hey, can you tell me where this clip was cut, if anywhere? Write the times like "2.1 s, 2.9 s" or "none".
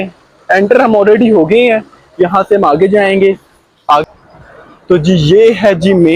4.0 s